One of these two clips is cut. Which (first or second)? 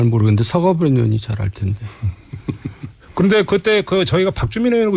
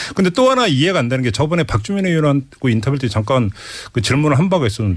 second